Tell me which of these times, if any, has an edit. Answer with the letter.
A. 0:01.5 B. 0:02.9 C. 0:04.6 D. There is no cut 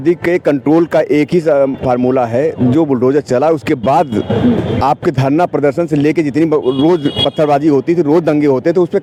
D